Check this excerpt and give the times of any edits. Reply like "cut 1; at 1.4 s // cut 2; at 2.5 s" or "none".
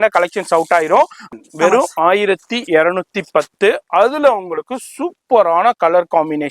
cut 1; at 1.3 s